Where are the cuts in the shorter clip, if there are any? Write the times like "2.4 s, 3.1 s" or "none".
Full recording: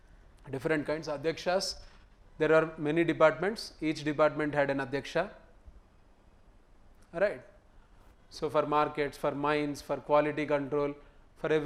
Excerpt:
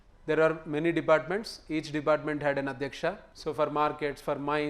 3.3 s